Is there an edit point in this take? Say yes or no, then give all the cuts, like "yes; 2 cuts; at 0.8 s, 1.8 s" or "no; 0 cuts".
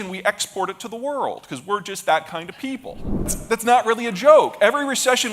yes; 1 cut; at 3.4 s